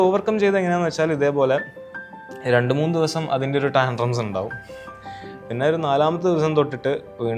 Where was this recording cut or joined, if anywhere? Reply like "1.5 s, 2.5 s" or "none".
none

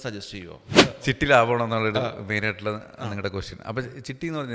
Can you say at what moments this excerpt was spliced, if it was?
0.9 s

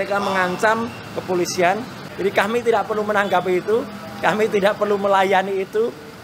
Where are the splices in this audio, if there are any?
none

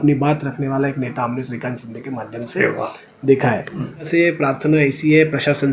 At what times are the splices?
4.0 s

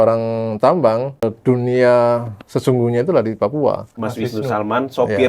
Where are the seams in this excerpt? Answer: 1.3 s, 4.0 s

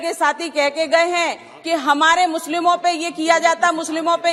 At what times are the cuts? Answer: none

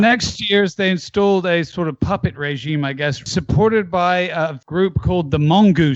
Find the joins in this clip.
3.3 s, 4.6 s

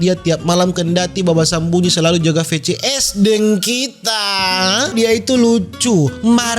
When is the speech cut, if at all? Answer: 4.9 s

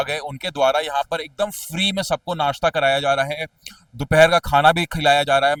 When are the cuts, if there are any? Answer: none

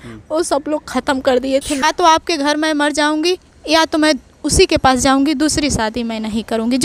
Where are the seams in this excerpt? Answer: 1.8 s

